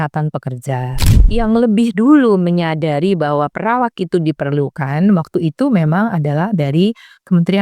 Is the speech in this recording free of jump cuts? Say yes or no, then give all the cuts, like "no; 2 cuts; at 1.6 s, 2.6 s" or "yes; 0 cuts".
no; 1 cut; at 1.2 s